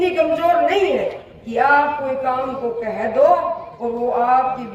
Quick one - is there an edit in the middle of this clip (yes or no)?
no